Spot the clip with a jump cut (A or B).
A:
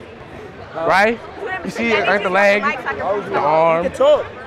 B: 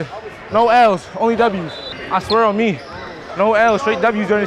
B